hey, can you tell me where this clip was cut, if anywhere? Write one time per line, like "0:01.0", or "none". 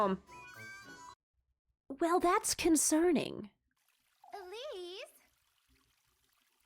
0:01.1